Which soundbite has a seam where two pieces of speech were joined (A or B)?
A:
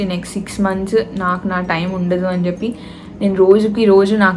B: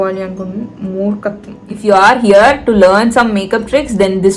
B